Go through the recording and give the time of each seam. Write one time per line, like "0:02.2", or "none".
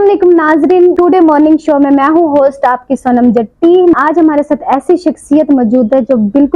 0:01.0
0:03.9

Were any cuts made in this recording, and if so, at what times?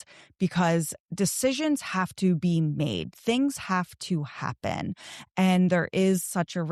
none

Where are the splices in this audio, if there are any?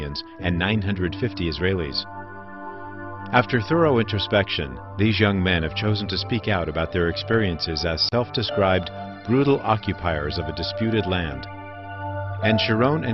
none

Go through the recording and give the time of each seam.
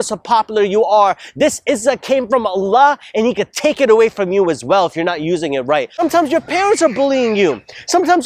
0:05.9

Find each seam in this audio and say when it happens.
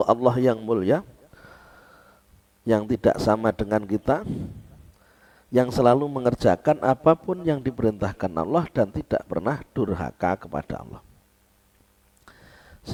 none

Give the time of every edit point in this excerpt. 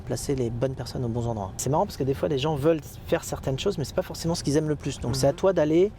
0:01.6

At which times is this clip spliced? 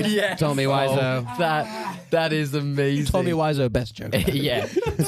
0:03.1

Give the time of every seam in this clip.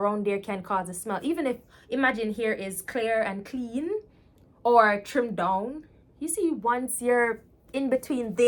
none

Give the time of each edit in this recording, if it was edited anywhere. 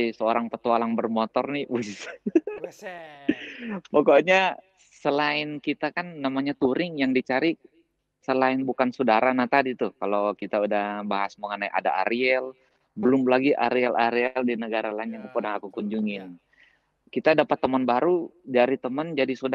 none

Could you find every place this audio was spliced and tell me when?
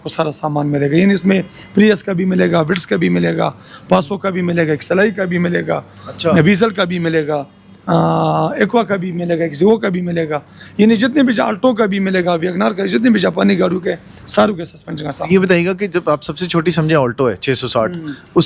none

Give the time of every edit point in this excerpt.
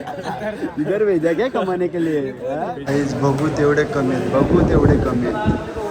0:02.8

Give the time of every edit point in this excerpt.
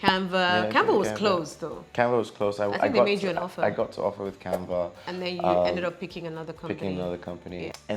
none

